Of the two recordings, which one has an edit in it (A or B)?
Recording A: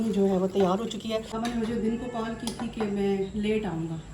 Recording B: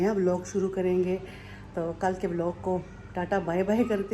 A